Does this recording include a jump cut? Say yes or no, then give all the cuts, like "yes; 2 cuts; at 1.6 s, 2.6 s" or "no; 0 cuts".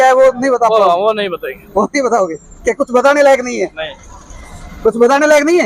no; 0 cuts